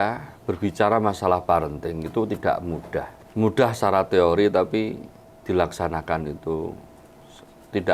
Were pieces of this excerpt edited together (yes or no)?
yes